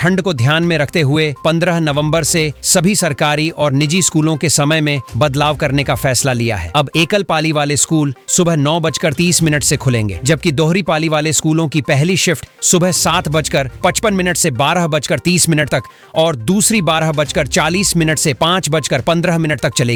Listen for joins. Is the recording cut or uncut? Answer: uncut